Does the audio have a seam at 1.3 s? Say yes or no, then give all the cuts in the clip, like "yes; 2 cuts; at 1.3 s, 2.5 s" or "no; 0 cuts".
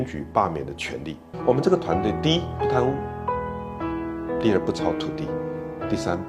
yes; 1 cut; at 1.3 s